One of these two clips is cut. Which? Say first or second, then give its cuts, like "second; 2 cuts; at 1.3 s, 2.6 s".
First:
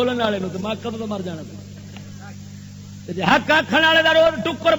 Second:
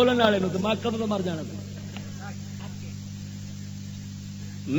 second; 1 cut; at 2.6 s